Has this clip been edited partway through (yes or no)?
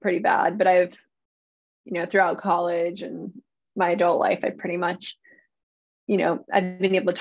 no